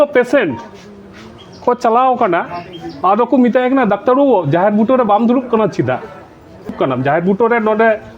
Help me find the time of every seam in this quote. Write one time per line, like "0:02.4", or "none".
0:06.7